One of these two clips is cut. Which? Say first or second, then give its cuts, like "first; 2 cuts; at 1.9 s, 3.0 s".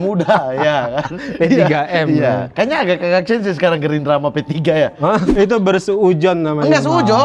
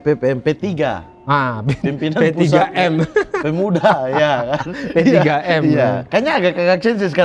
first; 1 cut; at 5.3 s